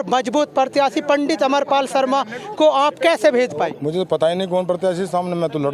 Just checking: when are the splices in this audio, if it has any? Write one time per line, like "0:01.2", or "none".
0:03.7